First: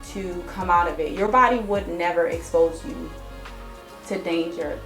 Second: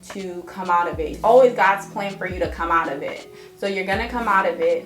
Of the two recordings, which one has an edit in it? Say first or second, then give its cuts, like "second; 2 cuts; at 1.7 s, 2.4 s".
second; 1 cut; at 1.1 s